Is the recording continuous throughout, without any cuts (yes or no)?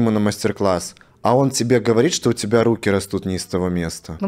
yes